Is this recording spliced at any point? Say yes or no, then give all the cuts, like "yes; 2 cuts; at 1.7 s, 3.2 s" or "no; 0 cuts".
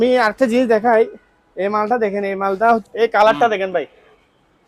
yes; 1 cut; at 2.8 s